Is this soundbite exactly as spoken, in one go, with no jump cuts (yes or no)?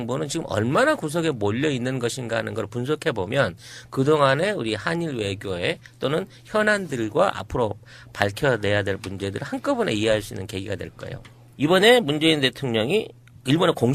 yes